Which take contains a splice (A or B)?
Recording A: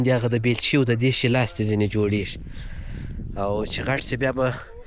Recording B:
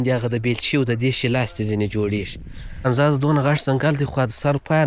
B